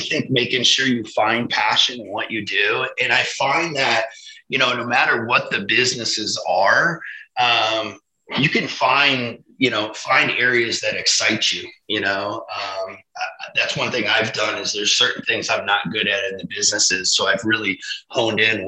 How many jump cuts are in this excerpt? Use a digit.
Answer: 0